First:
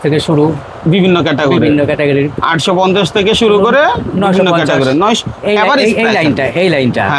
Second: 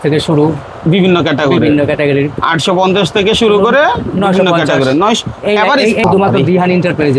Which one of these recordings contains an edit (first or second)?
second